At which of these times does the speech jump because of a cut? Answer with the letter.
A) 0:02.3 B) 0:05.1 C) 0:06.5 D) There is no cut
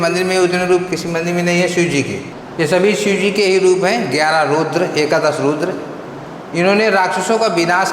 A